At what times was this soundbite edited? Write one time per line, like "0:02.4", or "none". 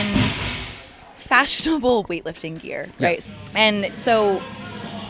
0:03.2